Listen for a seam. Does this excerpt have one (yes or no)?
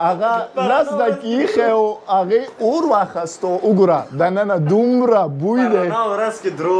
no